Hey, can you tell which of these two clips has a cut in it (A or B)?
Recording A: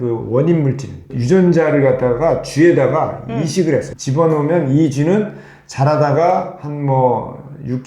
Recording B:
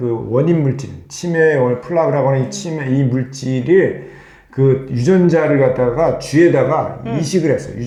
A